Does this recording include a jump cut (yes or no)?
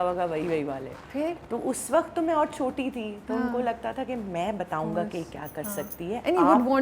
no